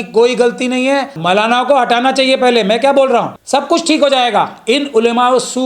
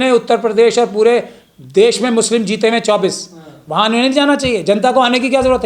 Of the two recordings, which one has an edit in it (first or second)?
first